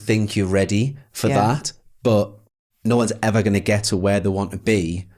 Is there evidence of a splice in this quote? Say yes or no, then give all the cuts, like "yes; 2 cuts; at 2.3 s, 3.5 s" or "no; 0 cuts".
no; 0 cuts